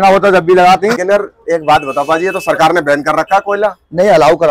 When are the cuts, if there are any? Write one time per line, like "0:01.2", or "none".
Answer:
0:00.9